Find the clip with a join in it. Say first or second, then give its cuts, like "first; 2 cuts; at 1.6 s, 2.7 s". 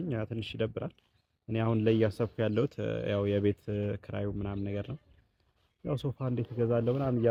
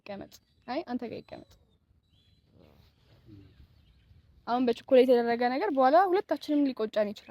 second; 1 cut; at 3.2 s